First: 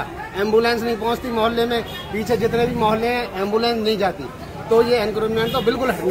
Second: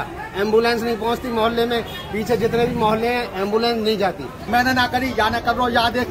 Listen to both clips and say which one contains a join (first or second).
second